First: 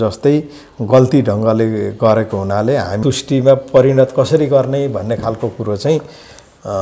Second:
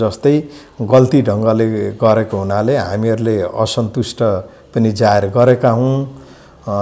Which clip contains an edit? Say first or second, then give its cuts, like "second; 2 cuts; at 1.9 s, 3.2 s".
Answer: first; 1 cut; at 3.0 s